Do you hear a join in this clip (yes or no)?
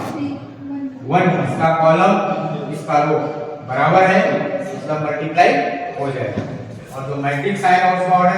yes